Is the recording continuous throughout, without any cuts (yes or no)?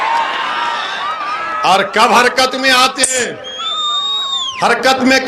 yes